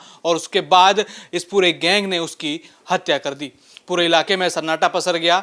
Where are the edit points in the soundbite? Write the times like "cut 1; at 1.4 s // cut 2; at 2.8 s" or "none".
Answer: none